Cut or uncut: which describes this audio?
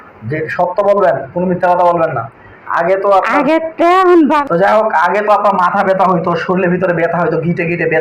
cut